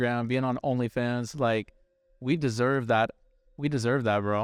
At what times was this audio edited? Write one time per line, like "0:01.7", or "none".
none